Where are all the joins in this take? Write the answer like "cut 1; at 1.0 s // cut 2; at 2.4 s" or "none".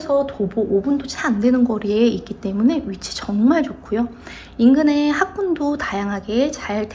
none

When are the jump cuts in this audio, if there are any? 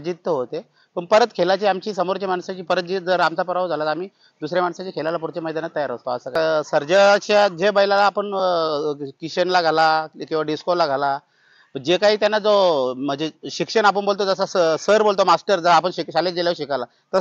cut 1; at 6.3 s

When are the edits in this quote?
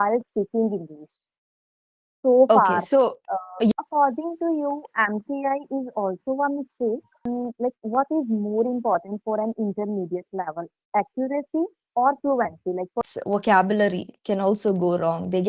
cut 1; at 3.7 s // cut 2; at 7.2 s // cut 3; at 13.1 s

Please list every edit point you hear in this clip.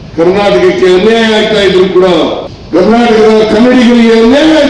cut 1; at 2.5 s

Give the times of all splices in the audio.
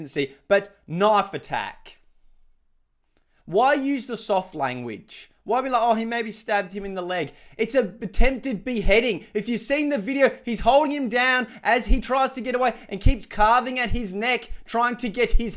none

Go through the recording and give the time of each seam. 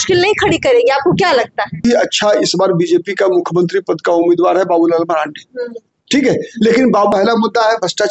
cut 1; at 1.8 s // cut 2; at 7.1 s

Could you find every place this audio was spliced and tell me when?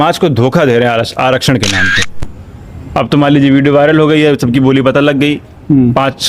cut 1; at 2.1 s

